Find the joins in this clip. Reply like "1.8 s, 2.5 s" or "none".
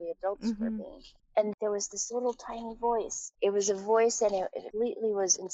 1.5 s, 3.2 s, 4.6 s